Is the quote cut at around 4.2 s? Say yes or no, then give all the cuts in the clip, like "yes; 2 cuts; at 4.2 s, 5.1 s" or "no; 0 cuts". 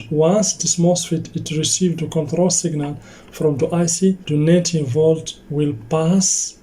yes; 1 cut; at 4.2 s